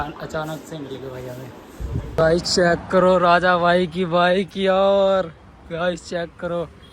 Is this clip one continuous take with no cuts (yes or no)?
no